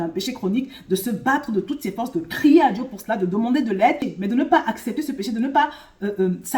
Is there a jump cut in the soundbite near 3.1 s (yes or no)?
no